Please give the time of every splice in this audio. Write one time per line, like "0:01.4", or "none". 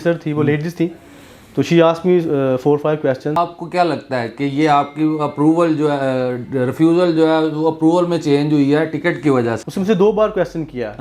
0:03.4
0:09.6